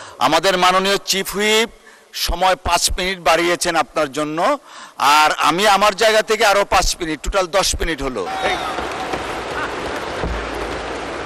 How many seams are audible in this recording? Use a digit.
0